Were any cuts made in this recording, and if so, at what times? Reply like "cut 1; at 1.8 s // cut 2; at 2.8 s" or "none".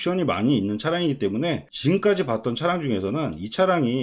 cut 1; at 1.7 s